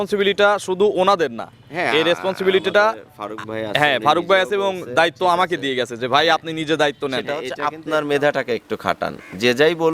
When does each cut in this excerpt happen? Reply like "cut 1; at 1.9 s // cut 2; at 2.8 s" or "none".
cut 1; at 7.4 s